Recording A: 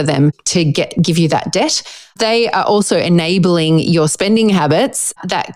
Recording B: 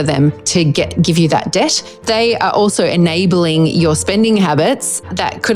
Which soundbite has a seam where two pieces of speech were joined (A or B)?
B